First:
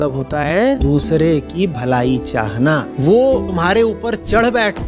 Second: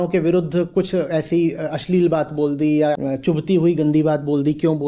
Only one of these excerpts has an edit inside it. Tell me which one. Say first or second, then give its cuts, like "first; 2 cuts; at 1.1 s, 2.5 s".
second; 1 cut; at 3.0 s